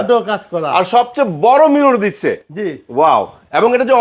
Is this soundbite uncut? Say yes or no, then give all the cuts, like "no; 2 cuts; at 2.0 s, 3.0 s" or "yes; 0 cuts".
yes; 0 cuts